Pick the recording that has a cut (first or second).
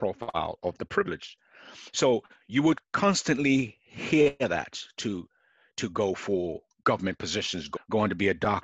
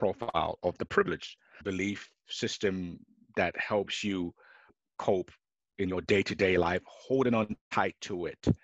second